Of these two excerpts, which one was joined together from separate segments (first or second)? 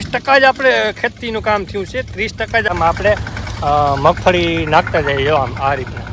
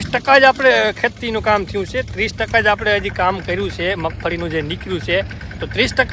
first